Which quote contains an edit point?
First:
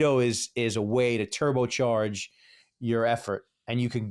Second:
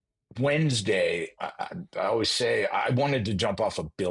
second; 1 cut; at 1.4 s

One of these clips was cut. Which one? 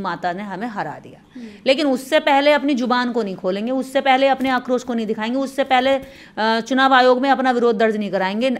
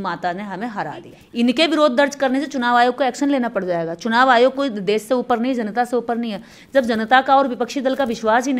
second; 1 cut; at 1.2 s

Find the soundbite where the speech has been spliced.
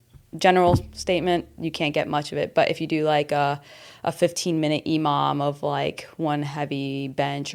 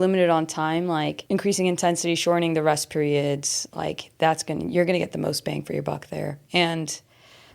second; 2 cuts; at 1.2 s, 6.4 s

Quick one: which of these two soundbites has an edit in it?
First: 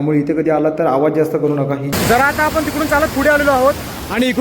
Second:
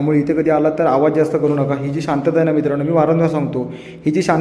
first; 1 cut; at 1.9 s

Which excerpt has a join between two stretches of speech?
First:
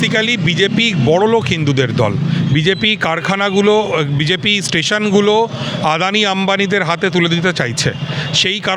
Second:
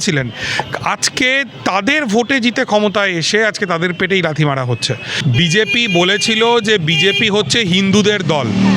second; 1 cut; at 5.1 s

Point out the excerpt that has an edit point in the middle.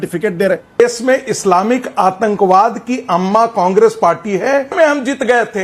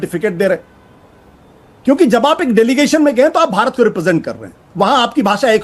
first; 2 cuts; at 0.8 s, 4.7 s

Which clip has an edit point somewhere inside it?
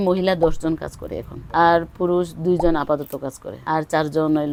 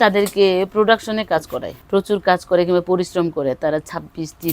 second; 1 cut; at 1.7 s

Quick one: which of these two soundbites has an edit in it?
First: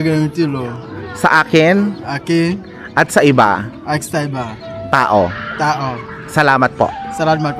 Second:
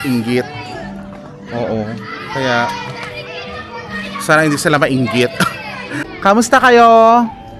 second; 1 cut; at 6.0 s

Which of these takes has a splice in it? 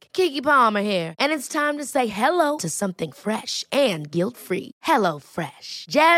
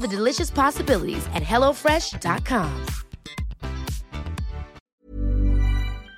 second; 1 cut; at 4.8 s

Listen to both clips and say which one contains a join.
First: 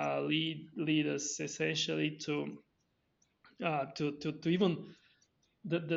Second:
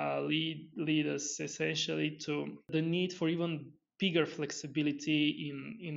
second; 1 cut; at 2.7 s

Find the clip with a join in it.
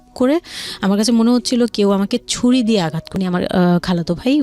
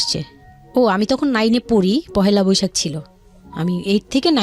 first; 1 cut; at 3.0 s

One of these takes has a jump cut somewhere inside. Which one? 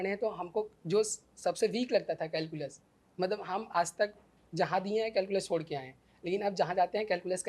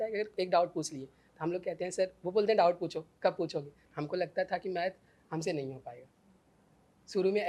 second; 1 cut; at 3.8 s

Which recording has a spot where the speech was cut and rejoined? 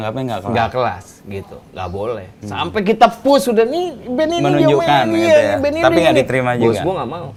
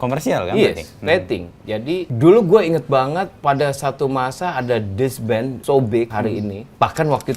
second; 4 cuts; at 2.1 s, 3.3 s, 5.6 s, 6.2 s

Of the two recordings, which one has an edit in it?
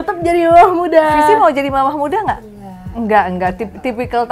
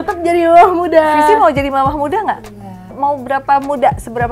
second; 1 cut; at 2.9 s

